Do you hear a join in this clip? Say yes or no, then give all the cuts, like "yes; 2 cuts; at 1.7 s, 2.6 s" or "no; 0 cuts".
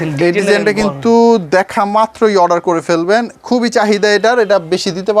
no; 0 cuts